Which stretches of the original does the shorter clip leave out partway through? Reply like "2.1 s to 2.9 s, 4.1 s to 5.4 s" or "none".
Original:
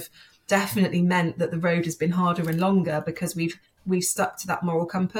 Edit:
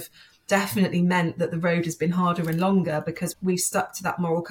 3.3 s to 3.7 s